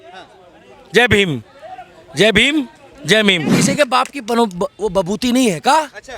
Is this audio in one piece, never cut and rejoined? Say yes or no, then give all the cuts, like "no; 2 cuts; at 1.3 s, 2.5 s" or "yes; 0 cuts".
no; 1 cut; at 3.6 s